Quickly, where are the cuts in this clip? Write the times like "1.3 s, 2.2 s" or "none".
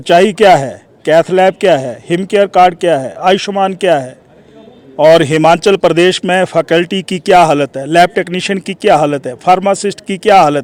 none